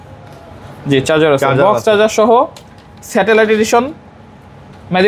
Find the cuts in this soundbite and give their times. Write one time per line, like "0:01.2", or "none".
none